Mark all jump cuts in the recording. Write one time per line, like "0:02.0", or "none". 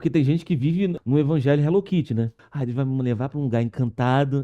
0:00.9
0:02.5